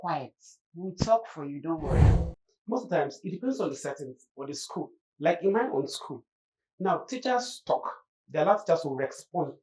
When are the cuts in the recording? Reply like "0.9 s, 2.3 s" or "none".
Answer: 2.0 s